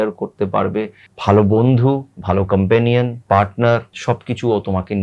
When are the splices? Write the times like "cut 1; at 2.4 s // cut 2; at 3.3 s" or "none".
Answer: cut 1; at 1.0 s // cut 2; at 3.2 s // cut 3; at 3.9 s